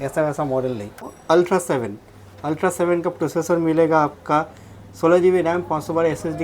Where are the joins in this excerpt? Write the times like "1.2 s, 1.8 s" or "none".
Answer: 1.2 s